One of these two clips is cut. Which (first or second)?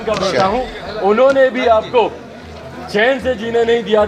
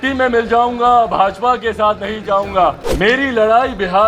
second